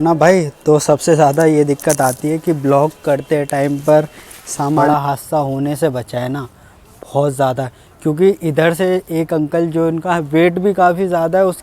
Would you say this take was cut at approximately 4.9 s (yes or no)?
yes